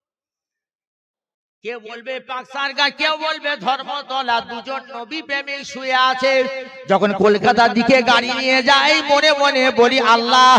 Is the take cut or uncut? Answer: uncut